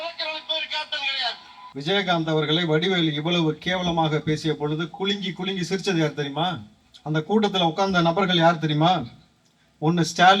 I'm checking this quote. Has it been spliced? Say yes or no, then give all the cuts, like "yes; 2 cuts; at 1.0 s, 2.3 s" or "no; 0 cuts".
yes; 1 cut; at 1.5 s